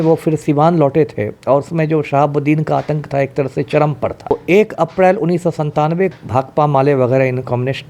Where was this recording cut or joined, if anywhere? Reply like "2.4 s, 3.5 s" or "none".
4.3 s, 6.1 s